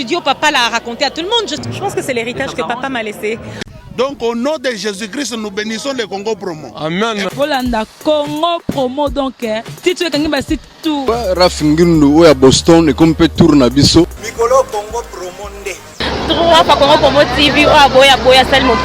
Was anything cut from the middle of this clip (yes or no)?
yes